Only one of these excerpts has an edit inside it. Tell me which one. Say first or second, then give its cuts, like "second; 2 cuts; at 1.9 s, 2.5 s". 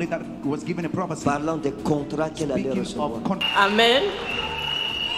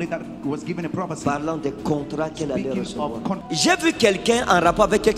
first; 1 cut; at 3.4 s